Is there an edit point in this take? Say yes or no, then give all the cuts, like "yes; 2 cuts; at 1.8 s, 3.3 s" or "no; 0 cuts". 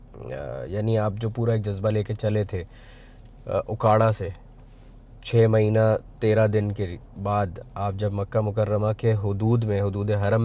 no; 0 cuts